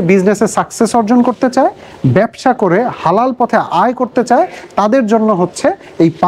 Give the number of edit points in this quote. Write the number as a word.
zero